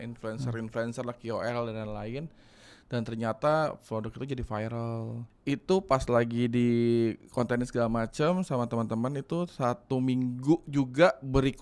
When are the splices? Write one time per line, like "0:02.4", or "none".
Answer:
0:05.2